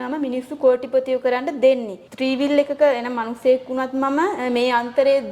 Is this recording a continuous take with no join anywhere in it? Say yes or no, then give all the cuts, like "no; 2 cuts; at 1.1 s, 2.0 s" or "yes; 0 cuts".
yes; 0 cuts